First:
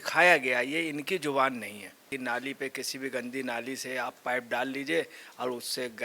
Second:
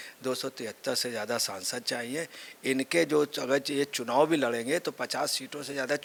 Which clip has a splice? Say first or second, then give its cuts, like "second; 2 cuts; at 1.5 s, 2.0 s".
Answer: first; 1 cut; at 2.1 s